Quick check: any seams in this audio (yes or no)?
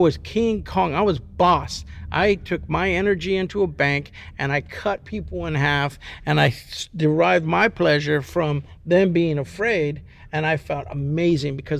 no